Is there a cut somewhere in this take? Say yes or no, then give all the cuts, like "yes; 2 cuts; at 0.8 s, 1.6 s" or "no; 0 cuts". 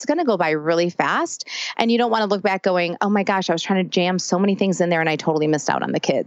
no; 0 cuts